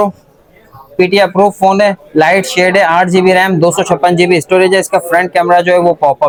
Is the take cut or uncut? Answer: uncut